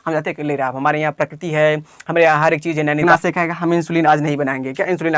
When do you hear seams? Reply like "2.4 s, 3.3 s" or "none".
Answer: 3.0 s